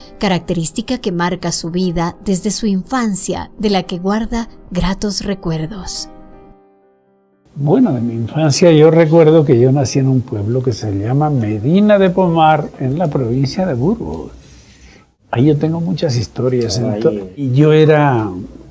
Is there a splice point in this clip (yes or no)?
yes